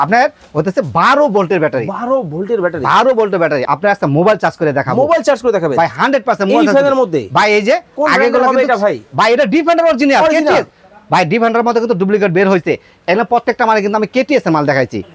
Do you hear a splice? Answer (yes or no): yes